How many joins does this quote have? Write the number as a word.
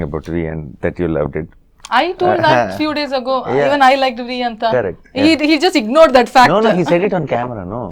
zero